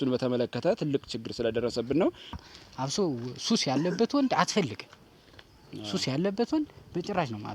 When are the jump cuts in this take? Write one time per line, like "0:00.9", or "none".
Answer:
0:02.4